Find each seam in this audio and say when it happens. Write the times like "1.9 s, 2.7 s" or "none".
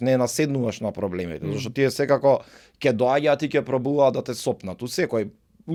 none